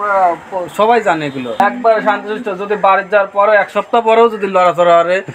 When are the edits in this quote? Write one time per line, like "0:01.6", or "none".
0:01.6